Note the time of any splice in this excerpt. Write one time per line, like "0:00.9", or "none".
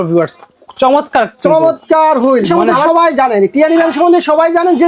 0:02.6